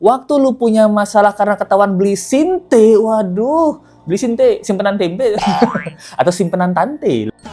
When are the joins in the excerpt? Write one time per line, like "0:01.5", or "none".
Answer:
none